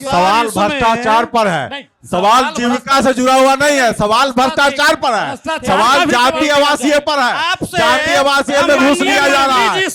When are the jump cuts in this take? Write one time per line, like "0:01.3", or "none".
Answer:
none